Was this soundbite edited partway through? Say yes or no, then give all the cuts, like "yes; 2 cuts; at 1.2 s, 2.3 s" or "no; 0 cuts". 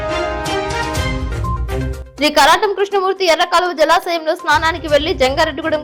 yes; 1 cut; at 2.0 s